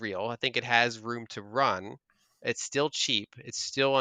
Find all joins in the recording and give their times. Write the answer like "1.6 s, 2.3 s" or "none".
none